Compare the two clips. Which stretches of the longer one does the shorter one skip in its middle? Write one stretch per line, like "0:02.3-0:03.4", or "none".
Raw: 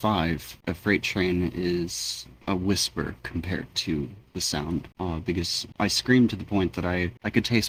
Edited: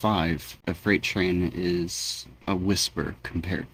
none